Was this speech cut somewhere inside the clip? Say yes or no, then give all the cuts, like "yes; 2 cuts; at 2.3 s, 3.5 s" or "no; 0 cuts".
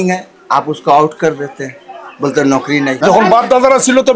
yes; 1 cut; at 3.0 s